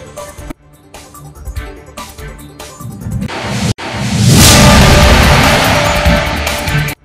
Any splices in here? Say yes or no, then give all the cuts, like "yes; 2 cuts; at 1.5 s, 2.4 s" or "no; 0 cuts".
no; 0 cuts